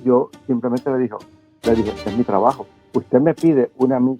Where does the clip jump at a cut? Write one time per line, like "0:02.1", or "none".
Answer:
0:02.7

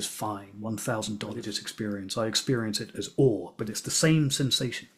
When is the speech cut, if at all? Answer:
0:01.6

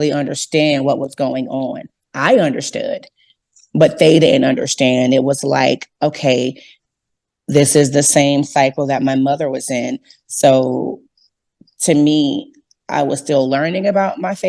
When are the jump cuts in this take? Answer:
0:06.7

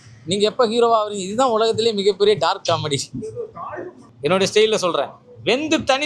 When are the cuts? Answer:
0:04.0

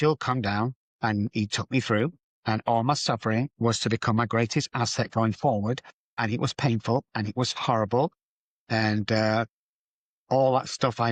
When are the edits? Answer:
0:01.0
0:03.5
0:06.2

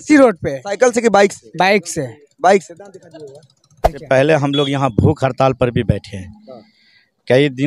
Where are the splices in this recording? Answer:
0:04.0

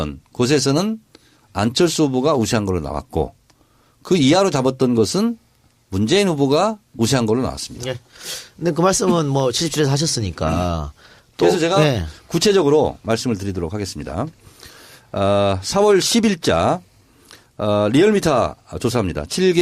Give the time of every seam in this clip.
0:03.3

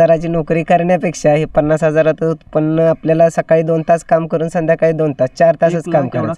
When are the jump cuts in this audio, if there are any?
none

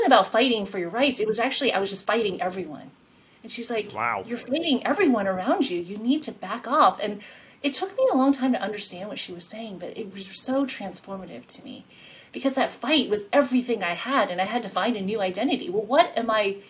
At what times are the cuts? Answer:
none

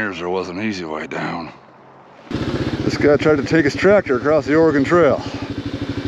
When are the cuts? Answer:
0:02.3

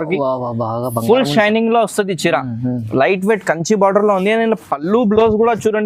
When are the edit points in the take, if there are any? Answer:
none

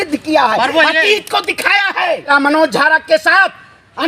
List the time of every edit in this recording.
0:02.3

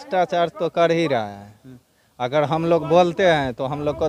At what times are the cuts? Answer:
none

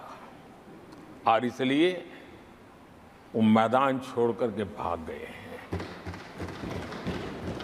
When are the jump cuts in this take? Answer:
none

